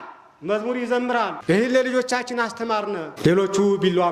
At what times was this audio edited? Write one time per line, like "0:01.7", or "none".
0:01.4
0:03.1